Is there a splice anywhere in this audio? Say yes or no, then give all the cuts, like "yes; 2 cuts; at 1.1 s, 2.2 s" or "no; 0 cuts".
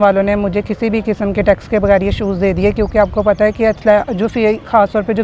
no; 0 cuts